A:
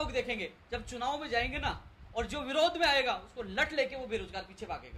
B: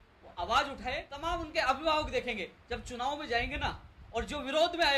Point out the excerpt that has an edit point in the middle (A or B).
B